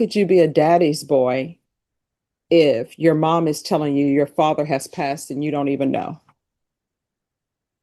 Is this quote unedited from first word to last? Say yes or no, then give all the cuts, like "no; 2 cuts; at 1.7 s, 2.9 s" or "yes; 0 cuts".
yes; 0 cuts